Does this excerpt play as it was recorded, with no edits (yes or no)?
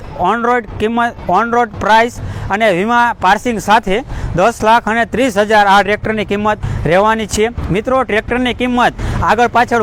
yes